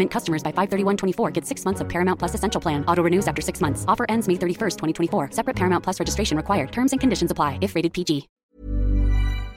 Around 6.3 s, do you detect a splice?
no; 1 cut; at 8.4 s

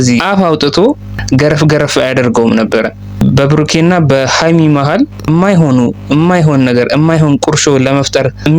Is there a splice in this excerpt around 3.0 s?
yes; 3 cuts; at 1.1 s, 3.0 s, 5.2 s

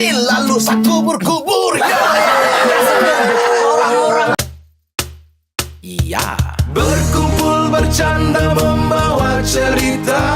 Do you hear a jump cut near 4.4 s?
yes; 1 cut; at 4.4 s

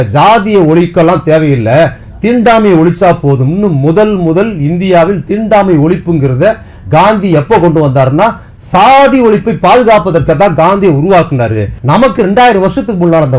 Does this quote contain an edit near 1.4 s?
no; 1 cut; at 11.7 s

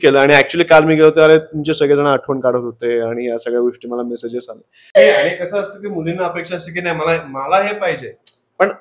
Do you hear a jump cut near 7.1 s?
no; 1 cut; at 5.0 s

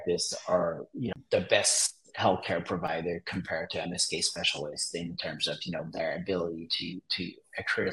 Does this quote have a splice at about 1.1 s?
yes; 1 cut; at 1.1 s

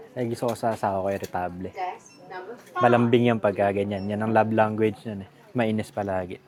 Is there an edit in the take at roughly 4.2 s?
no; 0 cuts

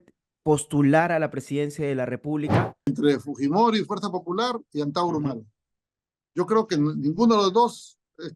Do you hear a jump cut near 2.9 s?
yes; 1 cut; at 2.9 s

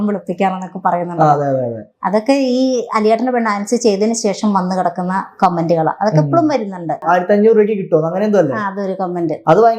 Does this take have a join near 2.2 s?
no; 1 cut; at 7.0 s

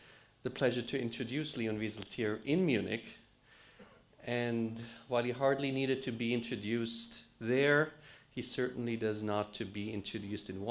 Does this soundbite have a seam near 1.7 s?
no; 0 cuts

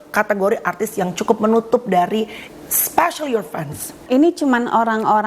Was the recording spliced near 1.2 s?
no; 1 cut; at 4.0 s

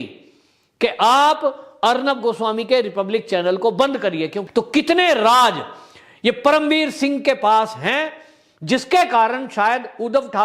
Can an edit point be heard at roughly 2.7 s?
no; 1 cut; at 4.4 s

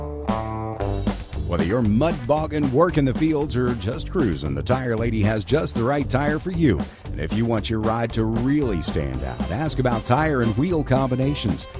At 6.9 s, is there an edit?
no; 0 cuts

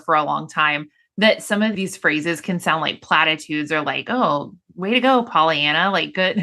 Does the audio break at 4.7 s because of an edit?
no; 1 cut; at 1.7 s

